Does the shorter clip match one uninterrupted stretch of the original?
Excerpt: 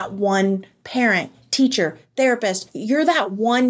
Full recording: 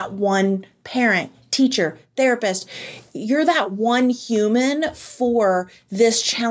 no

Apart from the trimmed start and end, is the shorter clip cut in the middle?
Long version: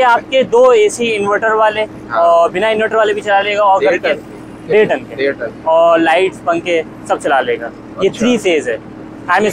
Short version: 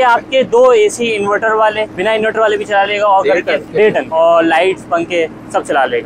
yes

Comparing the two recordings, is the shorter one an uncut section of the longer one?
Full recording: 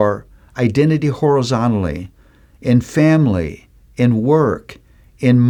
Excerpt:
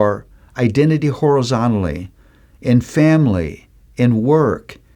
yes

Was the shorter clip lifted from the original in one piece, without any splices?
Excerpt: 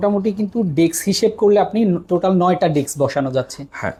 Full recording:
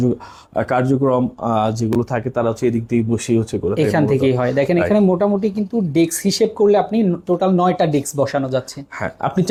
yes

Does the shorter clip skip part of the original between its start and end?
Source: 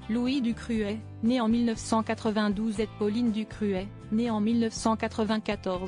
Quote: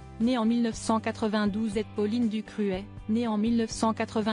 no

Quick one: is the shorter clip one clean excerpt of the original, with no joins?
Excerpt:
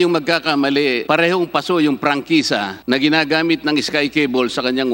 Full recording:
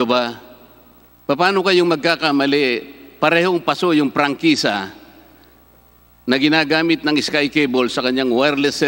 no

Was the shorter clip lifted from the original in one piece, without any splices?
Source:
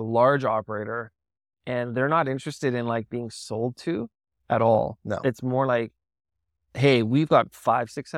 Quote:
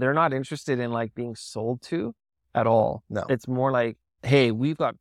no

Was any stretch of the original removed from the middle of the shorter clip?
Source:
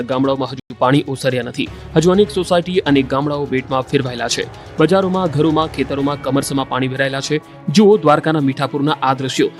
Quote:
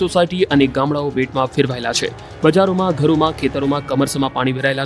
no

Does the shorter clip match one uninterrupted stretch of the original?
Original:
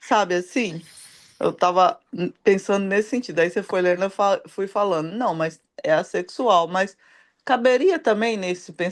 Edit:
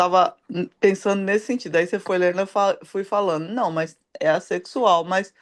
yes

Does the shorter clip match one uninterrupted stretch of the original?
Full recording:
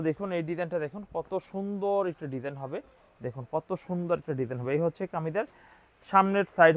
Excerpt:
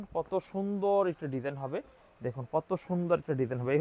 yes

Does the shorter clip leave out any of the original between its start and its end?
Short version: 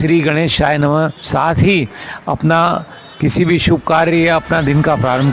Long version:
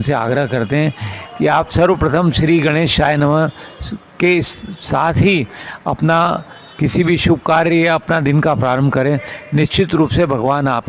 yes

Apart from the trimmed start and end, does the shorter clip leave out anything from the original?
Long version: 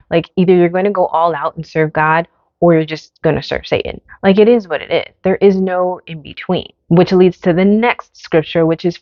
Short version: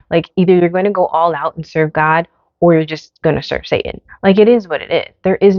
no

